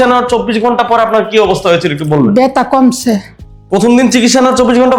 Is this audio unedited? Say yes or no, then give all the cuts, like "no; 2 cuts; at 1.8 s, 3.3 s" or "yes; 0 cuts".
yes; 0 cuts